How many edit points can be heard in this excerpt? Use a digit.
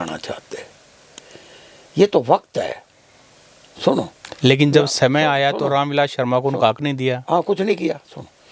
0